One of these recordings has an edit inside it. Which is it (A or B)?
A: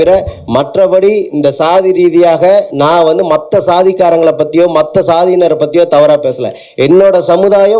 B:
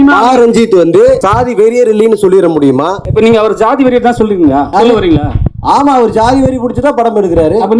B